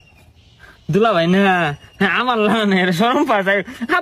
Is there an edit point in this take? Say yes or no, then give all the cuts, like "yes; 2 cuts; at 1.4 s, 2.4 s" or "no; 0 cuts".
no; 0 cuts